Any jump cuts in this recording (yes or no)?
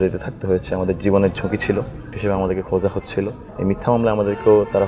yes